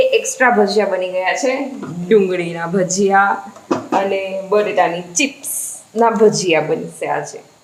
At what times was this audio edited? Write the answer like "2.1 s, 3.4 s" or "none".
none